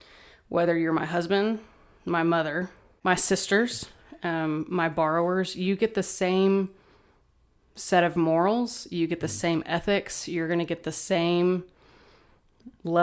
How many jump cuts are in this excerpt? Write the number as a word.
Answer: one